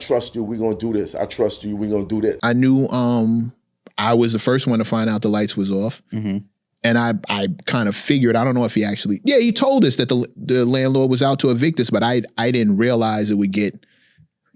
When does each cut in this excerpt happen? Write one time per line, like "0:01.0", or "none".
0:02.4